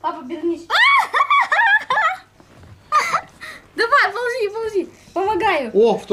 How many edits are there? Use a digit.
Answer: 0